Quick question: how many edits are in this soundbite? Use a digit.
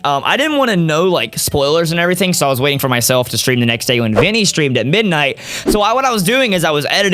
0